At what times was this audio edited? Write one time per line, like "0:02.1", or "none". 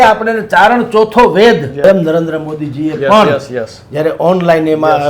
0:01.8